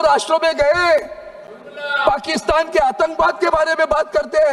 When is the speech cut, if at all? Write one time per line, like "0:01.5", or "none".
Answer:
none